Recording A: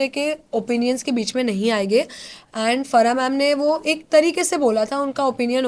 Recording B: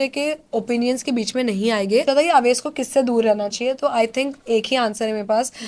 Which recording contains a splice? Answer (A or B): B